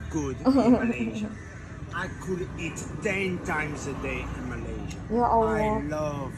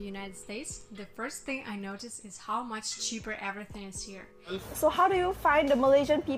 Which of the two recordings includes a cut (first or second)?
second